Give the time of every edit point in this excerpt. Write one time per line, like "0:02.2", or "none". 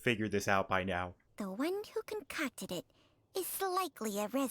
0:01.2